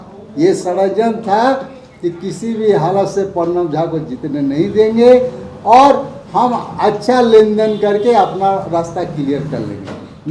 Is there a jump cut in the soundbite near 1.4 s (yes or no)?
no